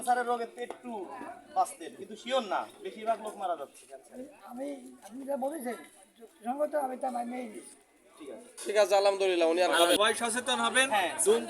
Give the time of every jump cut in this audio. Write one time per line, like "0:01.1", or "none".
0:10.0